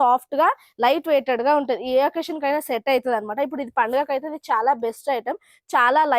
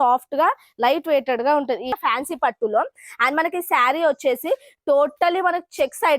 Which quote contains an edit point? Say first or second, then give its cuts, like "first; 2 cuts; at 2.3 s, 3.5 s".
second; 1 cut; at 1.9 s